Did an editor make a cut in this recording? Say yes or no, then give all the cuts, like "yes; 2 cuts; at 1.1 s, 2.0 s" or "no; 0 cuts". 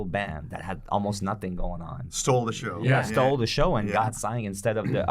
yes; 1 cut; at 2.1 s